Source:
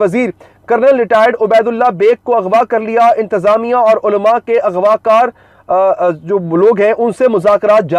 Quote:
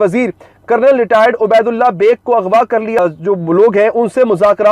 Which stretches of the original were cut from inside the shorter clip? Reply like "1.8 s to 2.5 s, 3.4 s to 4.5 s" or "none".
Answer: 3.0 s to 6.0 s